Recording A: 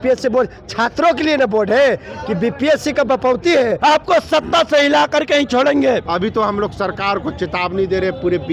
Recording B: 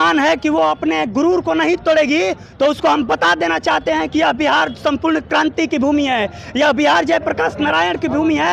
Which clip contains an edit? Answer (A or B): A